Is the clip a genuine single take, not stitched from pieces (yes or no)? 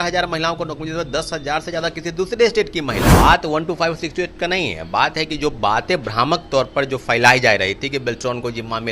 no